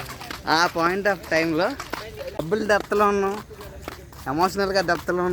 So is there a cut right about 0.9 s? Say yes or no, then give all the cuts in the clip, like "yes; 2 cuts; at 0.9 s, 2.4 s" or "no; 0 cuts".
no; 1 cut; at 2.4 s